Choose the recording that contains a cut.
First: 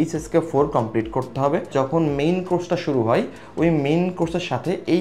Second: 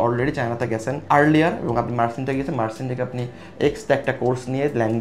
first; 1 cut; at 1.7 s

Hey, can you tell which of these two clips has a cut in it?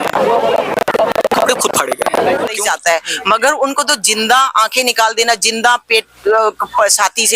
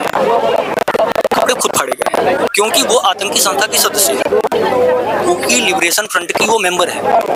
first; 1 cut; at 2.5 s

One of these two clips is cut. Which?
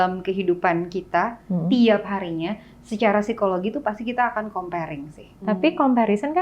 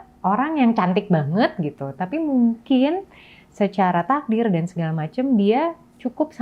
first; 1 cut; at 5.4 s

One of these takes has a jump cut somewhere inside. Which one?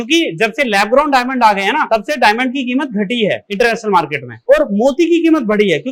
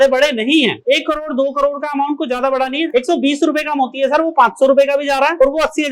second; 1 cut; at 2.9 s

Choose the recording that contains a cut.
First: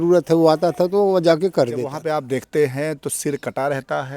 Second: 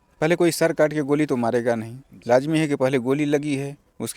first; 1 cut; at 2.0 s

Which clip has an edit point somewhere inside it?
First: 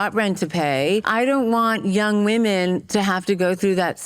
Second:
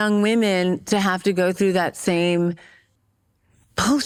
first; 1 cut; at 1.1 s

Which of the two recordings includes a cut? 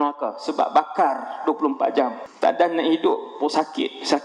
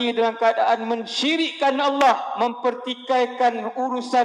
first; 1 cut; at 2.2 s

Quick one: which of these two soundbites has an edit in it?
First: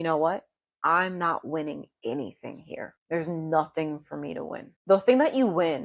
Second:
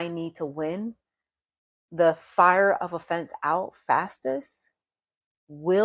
first; 2 cuts; at 2.9 s, 4.7 s

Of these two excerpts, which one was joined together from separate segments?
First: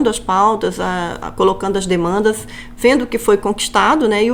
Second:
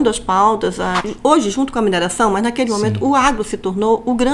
second; 1 cut; at 1.0 s

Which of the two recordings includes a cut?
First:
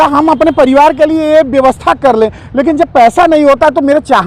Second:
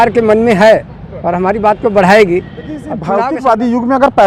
second; 1 cut; at 3.0 s

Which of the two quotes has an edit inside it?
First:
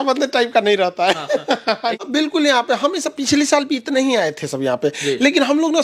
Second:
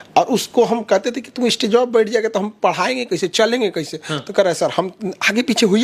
first; 1 cut; at 2.0 s

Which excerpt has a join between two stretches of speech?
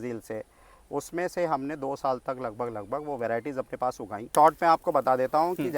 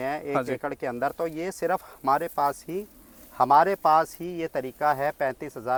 first; 1 cut; at 4.1 s

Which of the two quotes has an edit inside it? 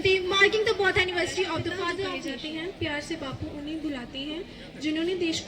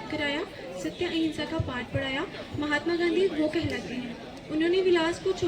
first; 1 cut; at 2.2 s

